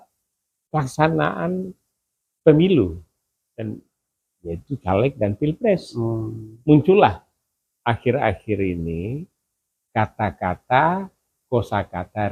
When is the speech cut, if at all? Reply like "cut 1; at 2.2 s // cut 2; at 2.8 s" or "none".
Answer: none